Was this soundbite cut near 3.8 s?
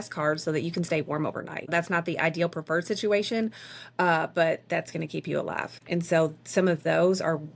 no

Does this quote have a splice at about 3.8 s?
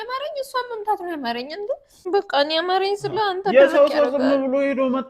no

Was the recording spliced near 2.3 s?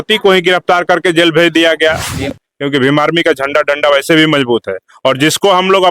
yes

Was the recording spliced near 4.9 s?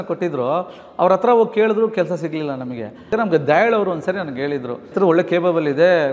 yes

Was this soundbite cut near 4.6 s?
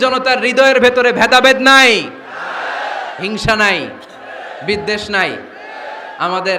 no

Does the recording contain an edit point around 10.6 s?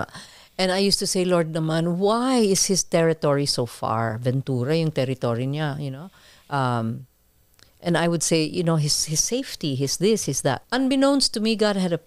yes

